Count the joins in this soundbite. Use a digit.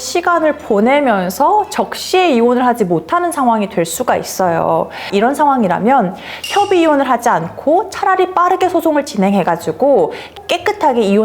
2